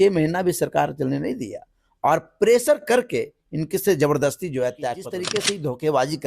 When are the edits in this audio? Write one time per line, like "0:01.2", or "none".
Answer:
0:05.2